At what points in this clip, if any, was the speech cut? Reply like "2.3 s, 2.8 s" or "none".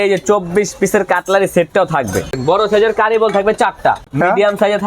2.3 s, 4.1 s